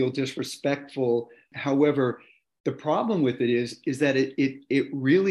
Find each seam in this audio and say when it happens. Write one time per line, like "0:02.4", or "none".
0:01.5